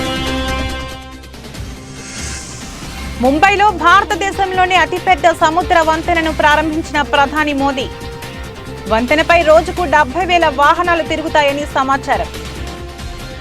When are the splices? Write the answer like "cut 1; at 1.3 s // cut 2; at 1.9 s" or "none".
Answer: none